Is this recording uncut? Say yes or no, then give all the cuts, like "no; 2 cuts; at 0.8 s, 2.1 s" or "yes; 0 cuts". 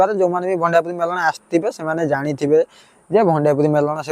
yes; 0 cuts